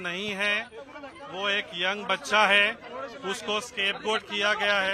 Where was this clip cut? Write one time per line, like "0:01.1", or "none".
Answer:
none